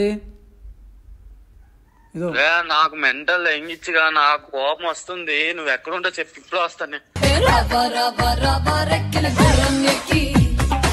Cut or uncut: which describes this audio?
uncut